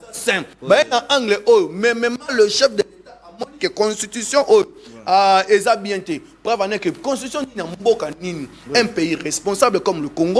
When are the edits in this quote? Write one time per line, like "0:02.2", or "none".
none